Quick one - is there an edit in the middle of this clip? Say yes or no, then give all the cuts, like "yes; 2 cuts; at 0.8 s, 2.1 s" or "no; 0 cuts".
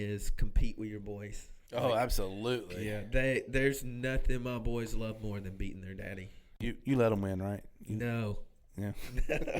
yes; 1 cut; at 6.6 s